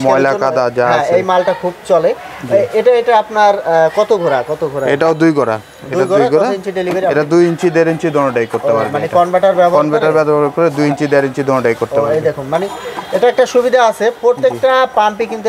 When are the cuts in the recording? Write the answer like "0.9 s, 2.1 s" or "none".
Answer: none